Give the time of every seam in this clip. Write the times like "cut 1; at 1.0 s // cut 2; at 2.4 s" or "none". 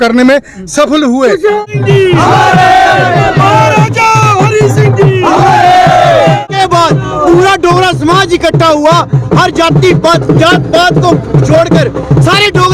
cut 1; at 1.6 s // cut 2; at 6.5 s